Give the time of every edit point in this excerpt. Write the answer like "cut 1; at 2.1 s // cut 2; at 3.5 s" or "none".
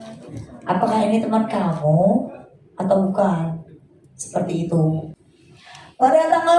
cut 1; at 5.1 s